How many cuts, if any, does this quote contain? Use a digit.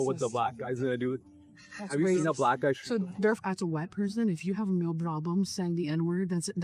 1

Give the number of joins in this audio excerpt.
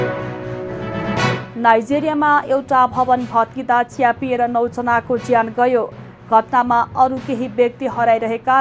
1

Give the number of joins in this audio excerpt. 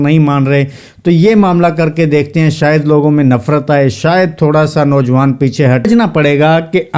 1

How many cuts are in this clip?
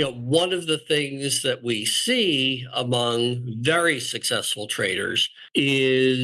1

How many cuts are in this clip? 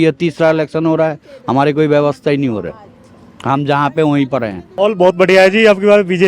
1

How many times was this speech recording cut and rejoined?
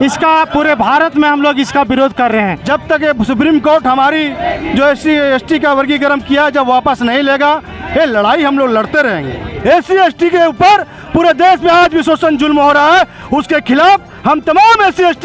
2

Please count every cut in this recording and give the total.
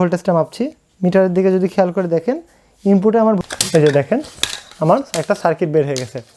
1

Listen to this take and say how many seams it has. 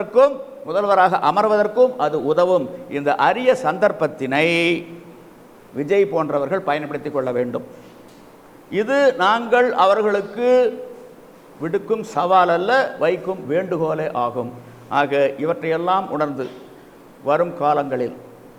0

